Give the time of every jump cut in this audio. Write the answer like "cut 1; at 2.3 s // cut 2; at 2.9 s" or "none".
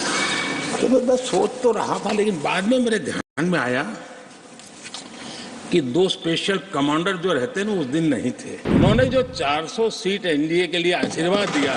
cut 1; at 8.5 s